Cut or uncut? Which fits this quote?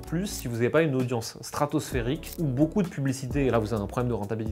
uncut